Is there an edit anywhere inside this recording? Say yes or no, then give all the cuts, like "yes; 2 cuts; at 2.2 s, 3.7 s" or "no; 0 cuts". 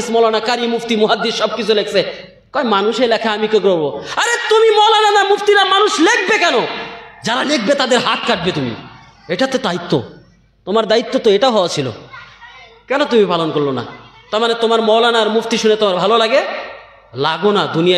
no; 0 cuts